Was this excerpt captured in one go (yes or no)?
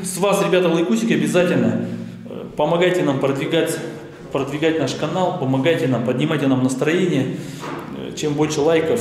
yes